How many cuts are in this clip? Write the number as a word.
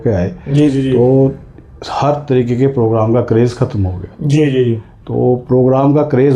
zero